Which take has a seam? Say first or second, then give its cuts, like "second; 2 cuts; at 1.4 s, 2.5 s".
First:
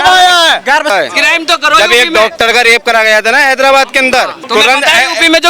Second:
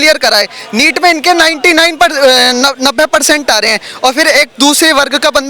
first; 2 cuts; at 0.9 s, 4.4 s